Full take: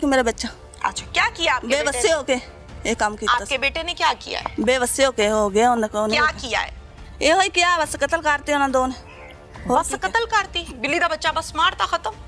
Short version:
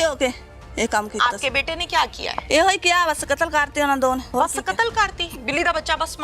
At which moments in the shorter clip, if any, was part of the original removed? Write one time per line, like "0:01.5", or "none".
0:02.3
0:04.3